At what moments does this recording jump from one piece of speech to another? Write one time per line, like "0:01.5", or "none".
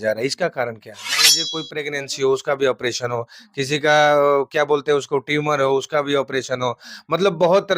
0:01.4

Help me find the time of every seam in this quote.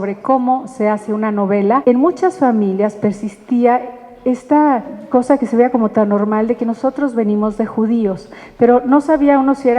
0:01.8
0:05.0

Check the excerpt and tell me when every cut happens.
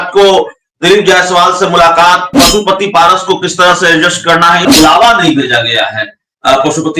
0:04.7

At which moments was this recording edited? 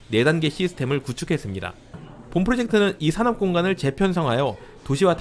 0:01.9

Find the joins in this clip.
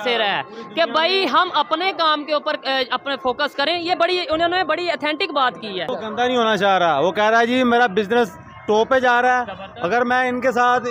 0:06.0

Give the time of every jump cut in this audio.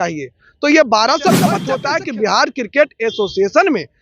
0:01.7

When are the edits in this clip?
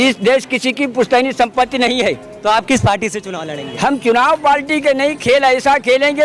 none

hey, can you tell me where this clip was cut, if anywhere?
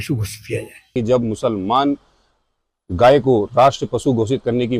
0:00.9

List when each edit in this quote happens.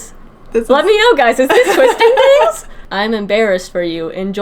0:02.8

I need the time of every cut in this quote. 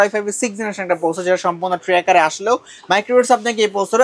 none

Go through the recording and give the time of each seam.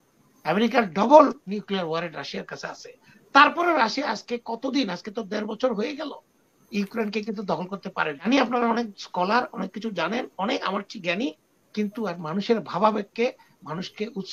0:08.2

